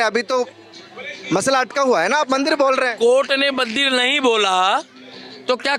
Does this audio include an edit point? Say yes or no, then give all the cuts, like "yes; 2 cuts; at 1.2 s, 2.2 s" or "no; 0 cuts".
no; 0 cuts